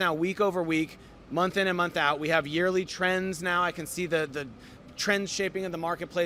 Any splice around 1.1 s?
no; 0 cuts

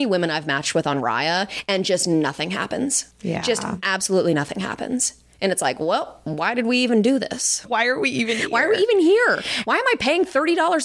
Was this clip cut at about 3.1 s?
yes; 2 cuts; at 3.1 s, 7.7 s

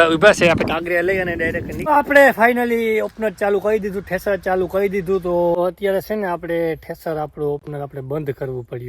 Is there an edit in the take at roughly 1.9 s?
yes; 2 cuts; at 1.9 s, 5.5 s

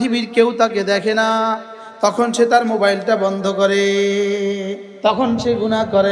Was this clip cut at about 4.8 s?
yes; 1 cut; at 4.8 s

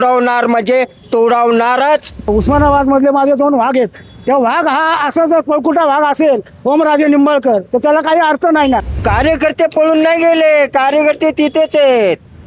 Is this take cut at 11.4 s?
no; 2 cuts; at 2.3 s, 8.9 s

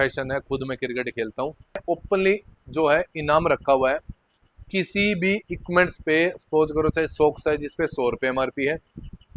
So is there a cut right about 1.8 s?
yes; 1 cut; at 1.8 s

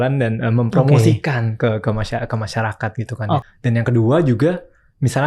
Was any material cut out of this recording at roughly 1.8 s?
no; 1 cut; at 3.4 s

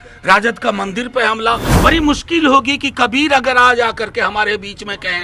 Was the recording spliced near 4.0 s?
no; 1 cut; at 1.7 s

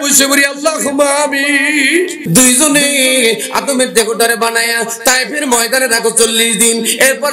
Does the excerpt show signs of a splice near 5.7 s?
no; 1 cut; at 2.2 s

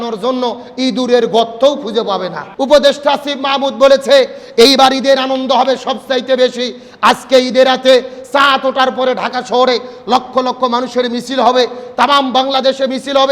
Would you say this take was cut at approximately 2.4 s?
yes; 1 cut; at 2.4 s

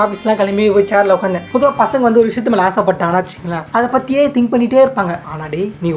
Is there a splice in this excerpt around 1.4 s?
yes; 2 cuts; at 1.4 s, 5.2 s

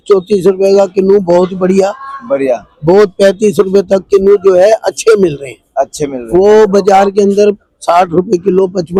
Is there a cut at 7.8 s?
no; 0 cuts

